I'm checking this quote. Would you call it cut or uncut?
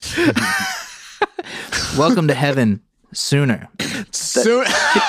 cut